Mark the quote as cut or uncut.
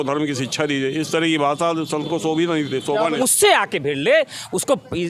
cut